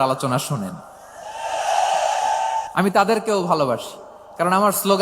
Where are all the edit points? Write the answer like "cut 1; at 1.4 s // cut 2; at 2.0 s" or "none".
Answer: cut 1; at 2.7 s